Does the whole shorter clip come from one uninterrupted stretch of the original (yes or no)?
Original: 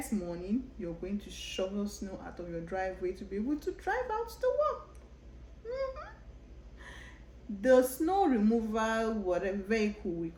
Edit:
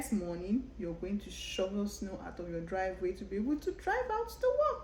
yes